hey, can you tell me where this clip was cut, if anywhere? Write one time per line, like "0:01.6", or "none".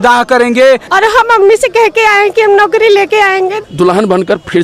0:00.9
0:03.6